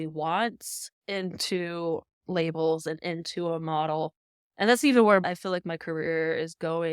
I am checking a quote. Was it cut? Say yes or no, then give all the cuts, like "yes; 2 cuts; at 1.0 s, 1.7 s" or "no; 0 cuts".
yes; 1 cut; at 5.2 s